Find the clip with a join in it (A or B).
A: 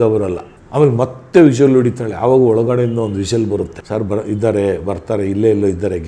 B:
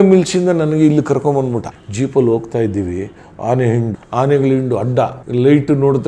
B